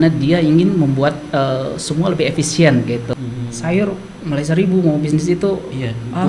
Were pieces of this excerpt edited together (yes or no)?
yes